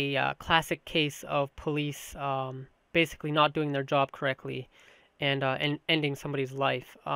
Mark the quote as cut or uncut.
cut